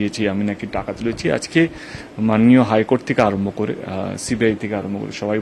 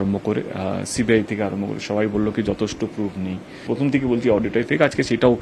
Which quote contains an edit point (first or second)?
second